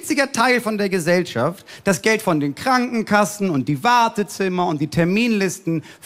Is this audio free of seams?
yes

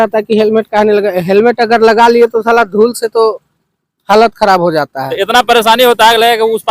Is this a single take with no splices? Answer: no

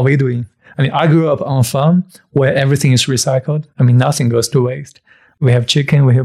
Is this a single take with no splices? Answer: yes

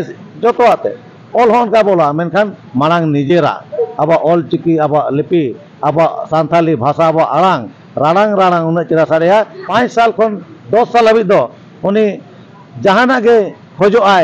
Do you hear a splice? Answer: yes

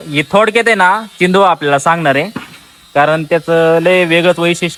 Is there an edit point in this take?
no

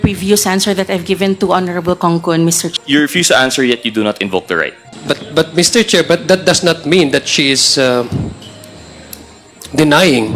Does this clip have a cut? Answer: yes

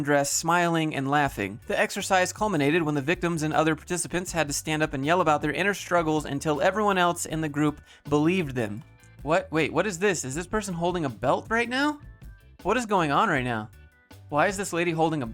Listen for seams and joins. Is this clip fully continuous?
no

